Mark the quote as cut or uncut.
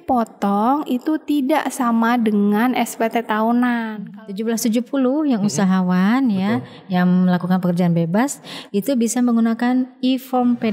cut